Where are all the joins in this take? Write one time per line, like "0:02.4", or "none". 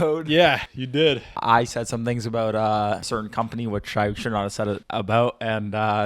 0:01.1
0:03.0
0:04.8